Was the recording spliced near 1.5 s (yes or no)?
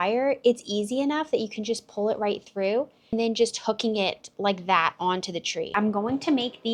no